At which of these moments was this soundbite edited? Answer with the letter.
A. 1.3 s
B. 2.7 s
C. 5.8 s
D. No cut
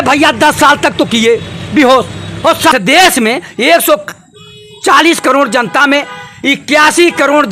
B